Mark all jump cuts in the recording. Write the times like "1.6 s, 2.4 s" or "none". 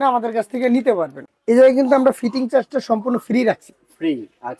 1.2 s